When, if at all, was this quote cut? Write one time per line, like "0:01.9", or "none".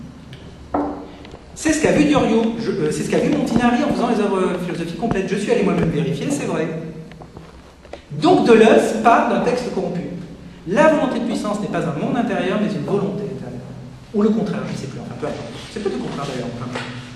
none